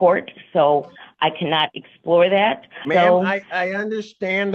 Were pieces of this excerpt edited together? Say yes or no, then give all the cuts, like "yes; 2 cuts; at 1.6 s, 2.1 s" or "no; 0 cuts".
yes; 1 cut; at 2.8 s